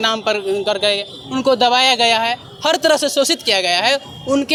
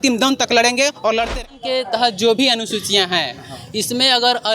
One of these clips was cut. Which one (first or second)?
second